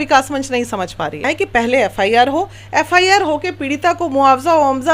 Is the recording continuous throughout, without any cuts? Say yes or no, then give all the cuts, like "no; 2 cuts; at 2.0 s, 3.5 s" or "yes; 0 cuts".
no; 1 cut; at 1.2 s